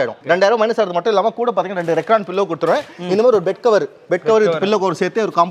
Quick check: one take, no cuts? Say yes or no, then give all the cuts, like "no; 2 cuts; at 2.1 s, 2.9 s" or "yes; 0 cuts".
yes; 0 cuts